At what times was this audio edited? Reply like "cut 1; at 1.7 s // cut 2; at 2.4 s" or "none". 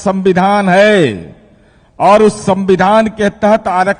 none